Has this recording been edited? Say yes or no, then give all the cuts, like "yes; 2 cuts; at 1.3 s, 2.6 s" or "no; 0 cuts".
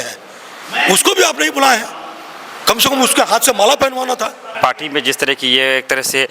yes; 1 cut; at 4.5 s